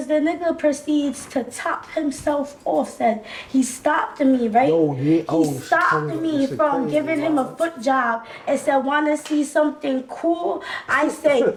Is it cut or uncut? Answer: uncut